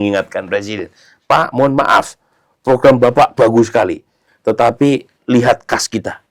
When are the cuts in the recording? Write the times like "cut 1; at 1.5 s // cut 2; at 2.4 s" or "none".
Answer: none

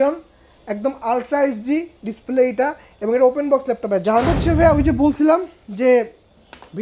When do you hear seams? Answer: cut 1; at 4.3 s

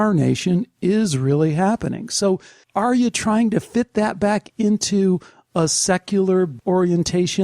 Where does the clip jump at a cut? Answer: cut 1; at 2.6 s

